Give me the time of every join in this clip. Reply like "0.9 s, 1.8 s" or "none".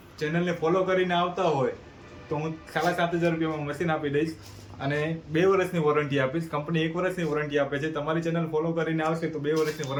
none